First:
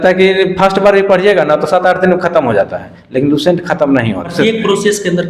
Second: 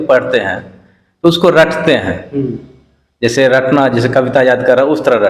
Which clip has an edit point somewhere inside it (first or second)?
first